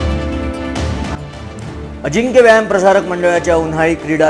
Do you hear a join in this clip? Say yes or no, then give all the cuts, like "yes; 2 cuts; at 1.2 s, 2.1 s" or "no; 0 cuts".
yes; 1 cut; at 1.2 s